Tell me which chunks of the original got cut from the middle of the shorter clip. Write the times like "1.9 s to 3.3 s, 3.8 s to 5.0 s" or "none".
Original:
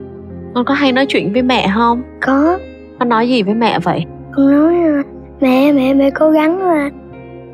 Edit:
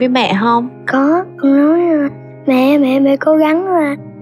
2.6 s to 4.2 s